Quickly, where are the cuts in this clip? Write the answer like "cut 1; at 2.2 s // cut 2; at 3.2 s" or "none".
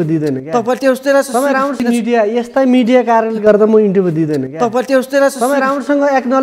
cut 1; at 1.8 s